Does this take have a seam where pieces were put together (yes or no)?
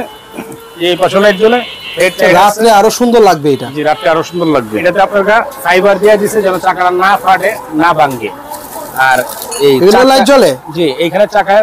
yes